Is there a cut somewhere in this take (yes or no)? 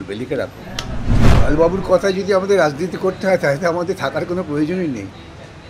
yes